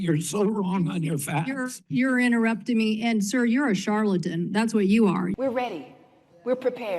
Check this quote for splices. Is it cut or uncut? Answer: cut